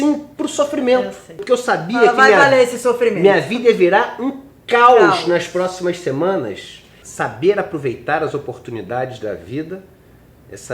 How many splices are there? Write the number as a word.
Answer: two